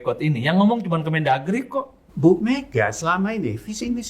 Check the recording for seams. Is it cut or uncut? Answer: cut